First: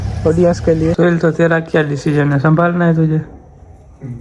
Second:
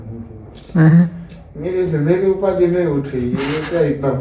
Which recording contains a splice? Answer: first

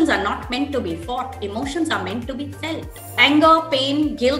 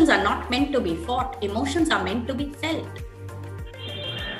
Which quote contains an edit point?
first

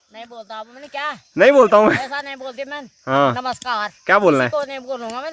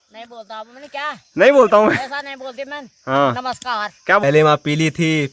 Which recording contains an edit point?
second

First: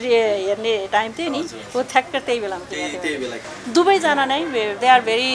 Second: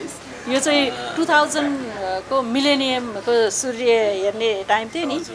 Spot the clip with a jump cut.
first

